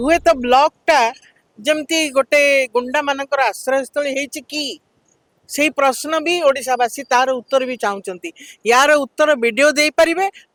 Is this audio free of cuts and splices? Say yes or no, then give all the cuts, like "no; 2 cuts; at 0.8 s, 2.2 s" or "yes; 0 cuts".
yes; 0 cuts